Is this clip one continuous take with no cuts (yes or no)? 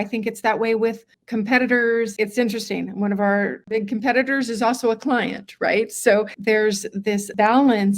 no